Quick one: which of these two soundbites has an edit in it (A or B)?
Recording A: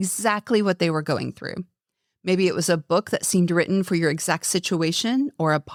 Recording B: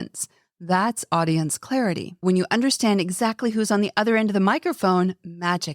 B